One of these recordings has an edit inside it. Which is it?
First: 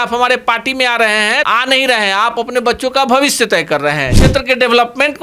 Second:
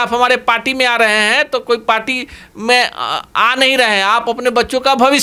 first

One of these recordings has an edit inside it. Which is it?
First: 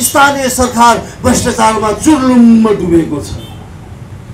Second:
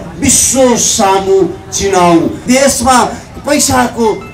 second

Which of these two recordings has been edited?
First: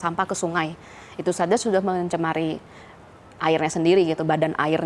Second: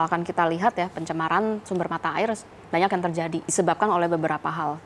second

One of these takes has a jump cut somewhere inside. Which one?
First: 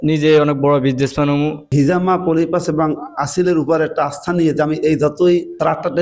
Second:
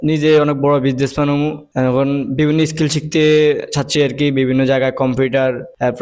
first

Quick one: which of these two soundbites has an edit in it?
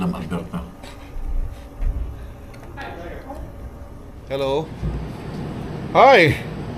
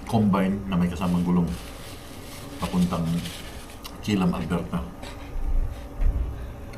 first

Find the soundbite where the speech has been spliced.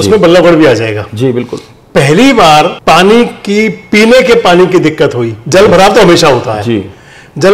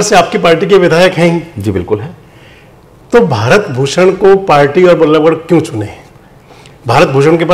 first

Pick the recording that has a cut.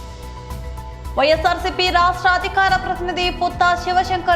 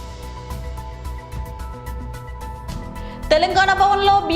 first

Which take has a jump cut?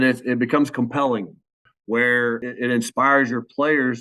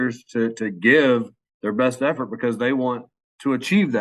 first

